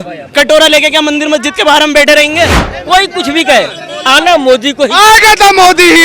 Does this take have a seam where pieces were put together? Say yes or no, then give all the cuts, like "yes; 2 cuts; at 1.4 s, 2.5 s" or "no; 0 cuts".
yes; 1 cut; at 2.7 s